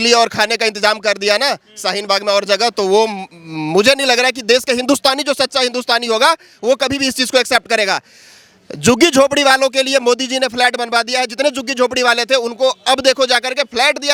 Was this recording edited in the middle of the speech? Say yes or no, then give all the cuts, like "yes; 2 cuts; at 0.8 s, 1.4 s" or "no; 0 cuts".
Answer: no; 0 cuts